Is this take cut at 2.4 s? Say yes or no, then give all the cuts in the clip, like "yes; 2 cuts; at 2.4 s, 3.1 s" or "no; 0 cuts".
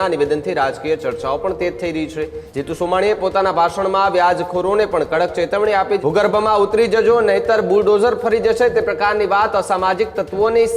yes; 2 cuts; at 2.4 s, 6.0 s